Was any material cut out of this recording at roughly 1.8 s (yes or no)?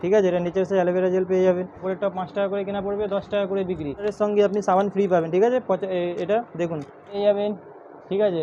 yes